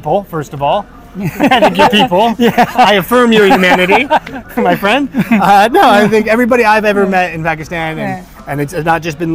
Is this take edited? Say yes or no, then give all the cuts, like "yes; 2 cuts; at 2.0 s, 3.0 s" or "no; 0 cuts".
no; 0 cuts